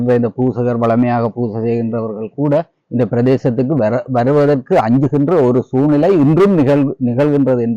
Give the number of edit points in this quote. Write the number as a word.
zero